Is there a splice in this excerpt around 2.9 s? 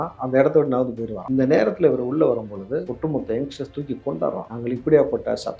yes; 3 cuts; at 1.1 s, 2.9 s, 4.5 s

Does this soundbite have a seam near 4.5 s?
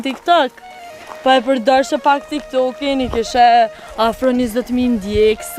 no; 0 cuts

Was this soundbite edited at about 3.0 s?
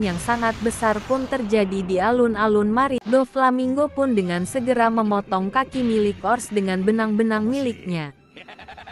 yes; 1 cut; at 3.0 s

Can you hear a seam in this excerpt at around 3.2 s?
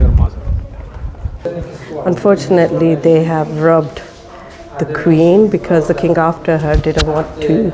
no; 1 cut; at 1.4 s

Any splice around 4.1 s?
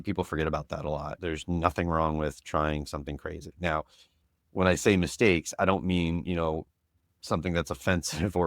no; 1 cut; at 1.1 s

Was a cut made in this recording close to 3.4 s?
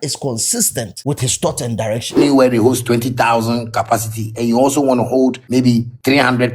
no; 3 cuts; at 0.9 s, 2.2 s, 5.7 s

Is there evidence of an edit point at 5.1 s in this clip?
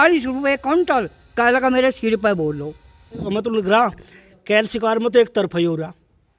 no; 1 cut; at 3.3 s

